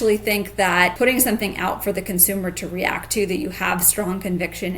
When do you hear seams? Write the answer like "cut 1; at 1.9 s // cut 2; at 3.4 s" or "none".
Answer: cut 1; at 0.9 s